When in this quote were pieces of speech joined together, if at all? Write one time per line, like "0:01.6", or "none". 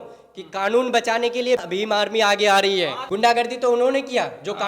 0:01.6
0:03.2